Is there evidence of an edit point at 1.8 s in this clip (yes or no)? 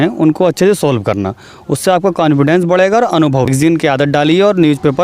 no